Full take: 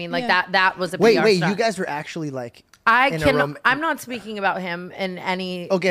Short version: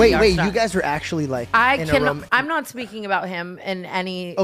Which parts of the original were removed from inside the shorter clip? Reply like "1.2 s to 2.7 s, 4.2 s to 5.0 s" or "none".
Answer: 2.5 s to 2.8 s

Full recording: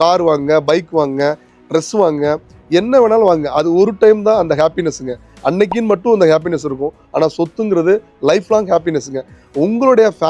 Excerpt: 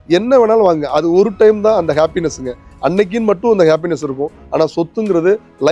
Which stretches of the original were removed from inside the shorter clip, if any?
none

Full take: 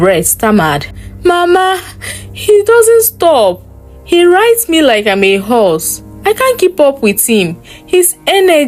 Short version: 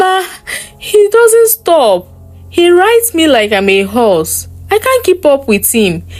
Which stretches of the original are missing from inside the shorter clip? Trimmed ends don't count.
none

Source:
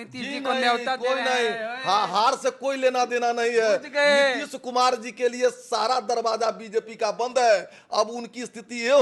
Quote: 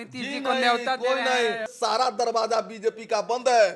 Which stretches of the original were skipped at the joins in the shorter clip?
1.7 s to 5.6 s

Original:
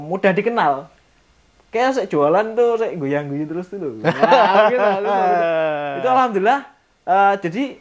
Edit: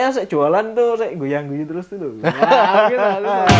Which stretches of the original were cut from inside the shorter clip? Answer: none

